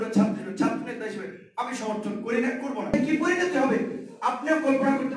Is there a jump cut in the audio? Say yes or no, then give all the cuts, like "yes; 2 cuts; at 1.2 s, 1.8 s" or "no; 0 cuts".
yes; 1 cut; at 2.9 s